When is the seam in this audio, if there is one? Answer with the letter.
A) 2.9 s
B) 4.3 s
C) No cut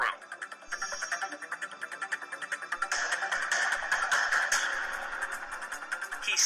A